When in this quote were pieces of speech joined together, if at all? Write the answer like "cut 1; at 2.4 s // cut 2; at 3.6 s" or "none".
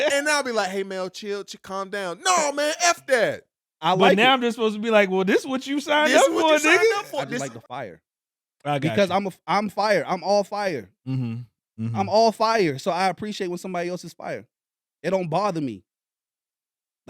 cut 1; at 7.1 s